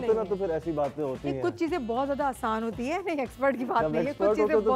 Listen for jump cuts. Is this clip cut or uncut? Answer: uncut